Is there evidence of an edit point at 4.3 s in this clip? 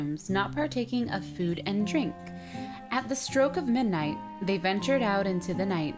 yes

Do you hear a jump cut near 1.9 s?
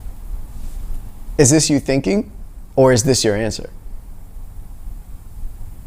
no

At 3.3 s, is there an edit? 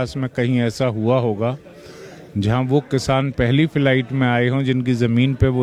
no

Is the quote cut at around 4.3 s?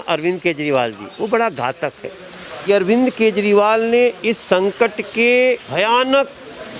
no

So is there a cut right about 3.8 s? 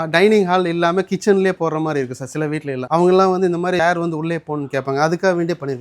yes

